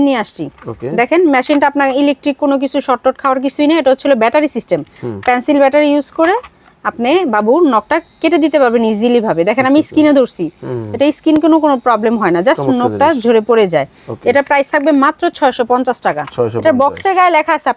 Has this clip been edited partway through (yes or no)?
no